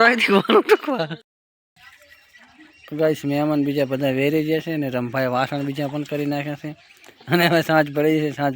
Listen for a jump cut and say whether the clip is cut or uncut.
cut